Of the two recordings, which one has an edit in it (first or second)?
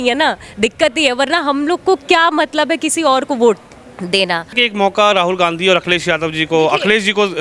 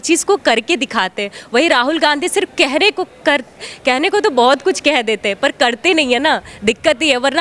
first